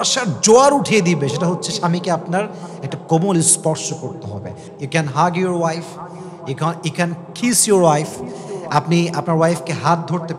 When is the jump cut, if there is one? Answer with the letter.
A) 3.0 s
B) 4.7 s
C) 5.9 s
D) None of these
B